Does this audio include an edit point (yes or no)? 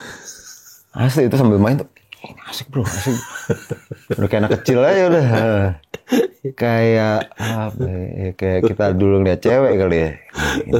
no